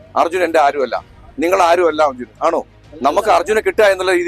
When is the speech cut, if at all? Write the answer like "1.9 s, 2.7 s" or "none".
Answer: none